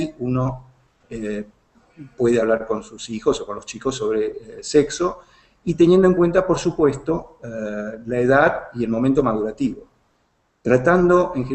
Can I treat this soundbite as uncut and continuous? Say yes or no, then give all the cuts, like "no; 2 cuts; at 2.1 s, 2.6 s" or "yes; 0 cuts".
yes; 0 cuts